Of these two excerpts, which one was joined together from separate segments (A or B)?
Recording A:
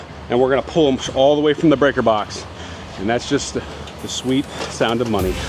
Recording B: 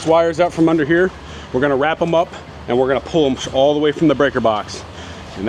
A